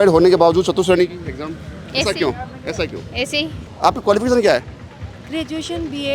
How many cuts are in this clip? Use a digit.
1